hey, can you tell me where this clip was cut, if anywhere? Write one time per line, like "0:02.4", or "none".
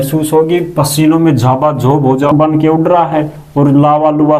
0:02.3

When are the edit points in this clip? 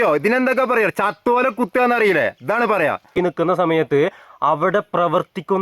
0:03.2

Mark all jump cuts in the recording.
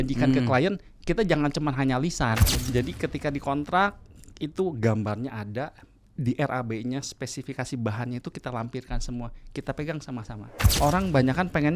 0:02.5
0:10.7

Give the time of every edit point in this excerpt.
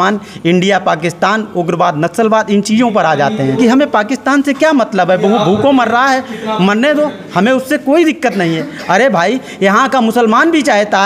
0:03.6

